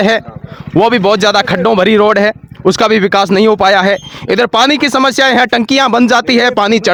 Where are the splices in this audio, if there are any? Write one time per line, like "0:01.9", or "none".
none